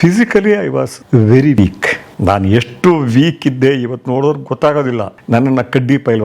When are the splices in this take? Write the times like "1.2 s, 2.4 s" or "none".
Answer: 1.0 s, 1.6 s, 5.1 s

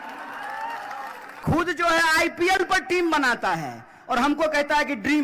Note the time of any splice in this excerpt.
1.2 s

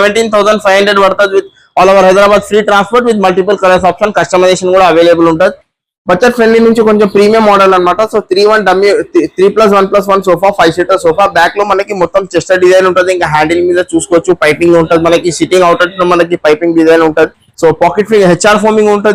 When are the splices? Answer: none

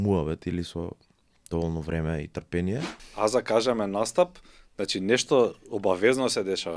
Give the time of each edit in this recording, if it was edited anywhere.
3.0 s

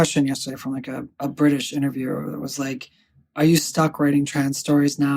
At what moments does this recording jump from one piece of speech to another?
1.1 s

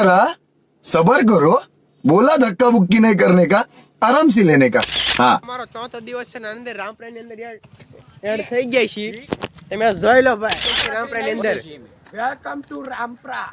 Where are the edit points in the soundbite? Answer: 5.4 s, 10.8 s

